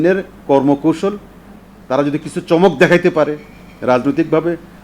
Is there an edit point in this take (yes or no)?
yes